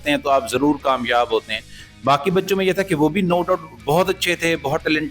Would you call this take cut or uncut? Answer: uncut